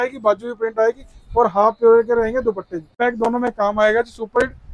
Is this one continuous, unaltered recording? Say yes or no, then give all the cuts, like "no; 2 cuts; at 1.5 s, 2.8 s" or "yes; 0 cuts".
no; 1 cut; at 3.0 s